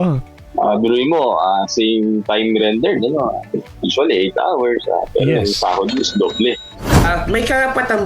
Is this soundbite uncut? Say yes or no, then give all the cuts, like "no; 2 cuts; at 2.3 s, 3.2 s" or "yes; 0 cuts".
no; 1 cut; at 7.0 s